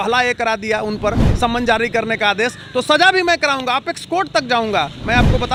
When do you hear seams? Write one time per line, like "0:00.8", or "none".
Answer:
none